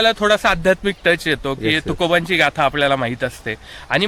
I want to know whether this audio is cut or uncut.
uncut